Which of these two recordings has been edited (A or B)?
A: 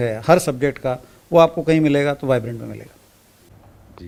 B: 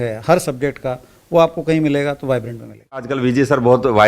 B